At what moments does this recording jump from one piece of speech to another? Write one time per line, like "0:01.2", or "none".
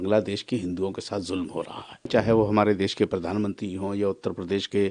0:02.1

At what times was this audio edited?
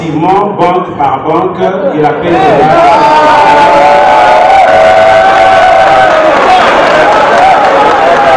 none

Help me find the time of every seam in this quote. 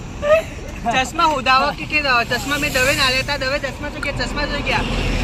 none

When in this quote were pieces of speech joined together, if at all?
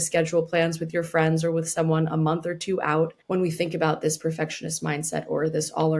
0:03.2

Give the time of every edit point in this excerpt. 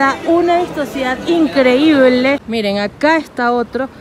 0:02.5

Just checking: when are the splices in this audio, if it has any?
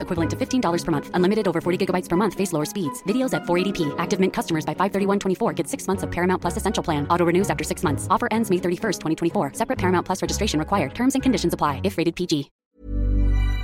0:12.6

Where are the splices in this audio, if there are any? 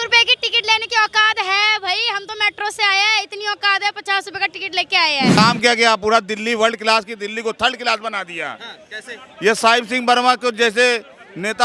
0:05.4

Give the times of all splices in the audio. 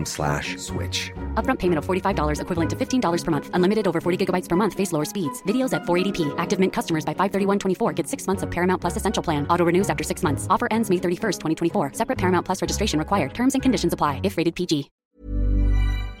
0:14.9

